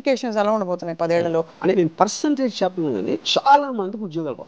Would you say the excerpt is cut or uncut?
cut